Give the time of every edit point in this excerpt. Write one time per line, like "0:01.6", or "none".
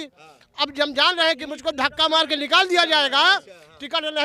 none